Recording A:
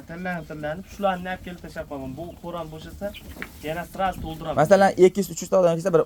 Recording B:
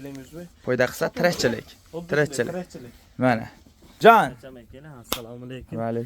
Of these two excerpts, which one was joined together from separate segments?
B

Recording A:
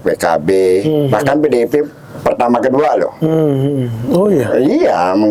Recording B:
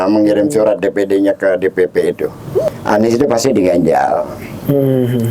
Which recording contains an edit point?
B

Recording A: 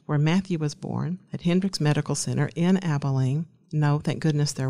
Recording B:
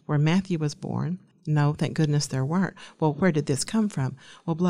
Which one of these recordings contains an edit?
B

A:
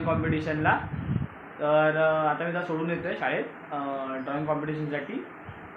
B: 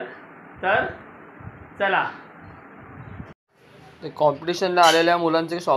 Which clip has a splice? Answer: B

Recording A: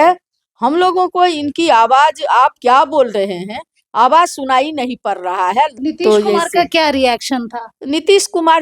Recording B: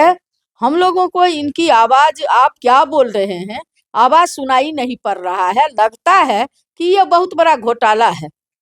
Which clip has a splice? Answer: A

